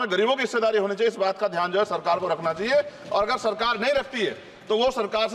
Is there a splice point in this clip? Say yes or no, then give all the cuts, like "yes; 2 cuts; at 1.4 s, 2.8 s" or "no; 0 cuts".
no; 0 cuts